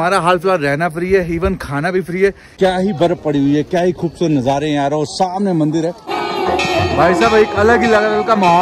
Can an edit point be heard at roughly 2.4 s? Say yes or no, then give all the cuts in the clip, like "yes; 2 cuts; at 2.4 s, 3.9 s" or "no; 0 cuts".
yes; 2 cuts; at 2.4 s, 6.1 s